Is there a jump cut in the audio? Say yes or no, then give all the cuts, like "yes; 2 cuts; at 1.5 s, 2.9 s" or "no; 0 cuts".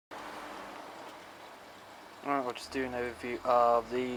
no; 0 cuts